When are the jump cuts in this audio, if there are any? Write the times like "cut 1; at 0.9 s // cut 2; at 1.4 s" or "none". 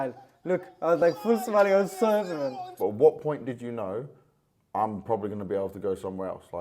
cut 1; at 2.7 s